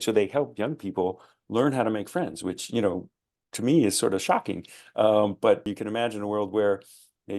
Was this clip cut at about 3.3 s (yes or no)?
no